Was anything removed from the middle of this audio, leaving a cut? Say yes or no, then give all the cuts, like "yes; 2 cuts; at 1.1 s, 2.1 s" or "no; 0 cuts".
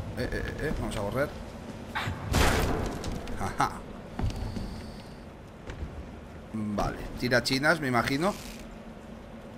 yes; 1 cut; at 6.7 s